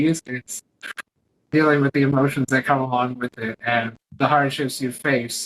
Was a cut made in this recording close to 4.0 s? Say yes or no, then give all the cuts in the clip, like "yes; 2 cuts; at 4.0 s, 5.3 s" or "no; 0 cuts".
yes; 1 cut; at 4.0 s